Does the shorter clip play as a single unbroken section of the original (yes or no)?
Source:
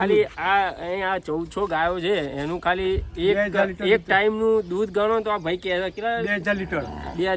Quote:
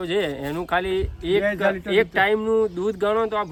yes